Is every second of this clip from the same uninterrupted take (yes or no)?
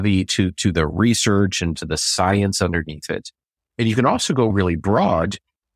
no